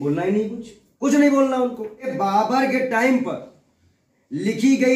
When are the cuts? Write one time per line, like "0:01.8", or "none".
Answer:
0:02.1